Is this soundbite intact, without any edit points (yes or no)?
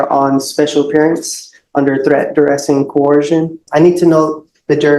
no